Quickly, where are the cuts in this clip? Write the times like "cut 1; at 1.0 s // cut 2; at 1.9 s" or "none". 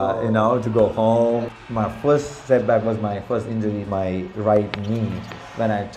cut 1; at 1.5 s // cut 2; at 3.8 s